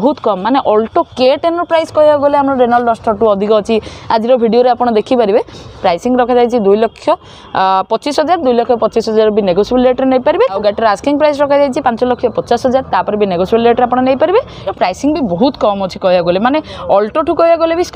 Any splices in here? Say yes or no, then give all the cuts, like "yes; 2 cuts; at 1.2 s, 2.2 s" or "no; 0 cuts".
yes; 3 cuts; at 5.8 s, 10.6 s, 14.6 s